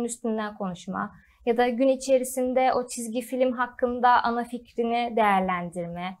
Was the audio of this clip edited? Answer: no; 0 cuts

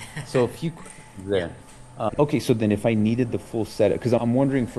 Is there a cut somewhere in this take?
yes; 1 cut; at 2.1 s

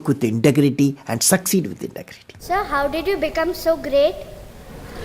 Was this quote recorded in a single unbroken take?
no; 1 cut; at 2.4 s

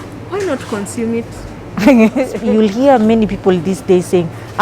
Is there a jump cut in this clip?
yes; 1 cut; at 2.3 s

